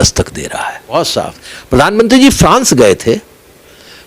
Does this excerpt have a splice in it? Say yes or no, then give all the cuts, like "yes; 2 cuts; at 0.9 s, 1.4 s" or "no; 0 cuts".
yes; 1 cut; at 1.0 s